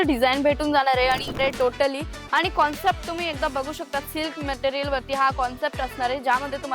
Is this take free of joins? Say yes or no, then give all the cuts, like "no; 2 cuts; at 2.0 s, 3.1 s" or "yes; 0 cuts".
no; 1 cut; at 1.4 s